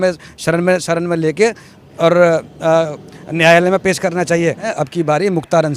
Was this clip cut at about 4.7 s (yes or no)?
yes